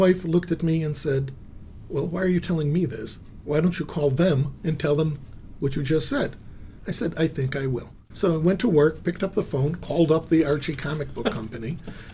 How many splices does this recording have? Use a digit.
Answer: 1